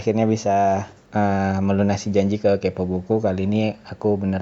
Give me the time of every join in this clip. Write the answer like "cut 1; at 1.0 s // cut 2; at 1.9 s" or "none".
cut 1; at 1.0 s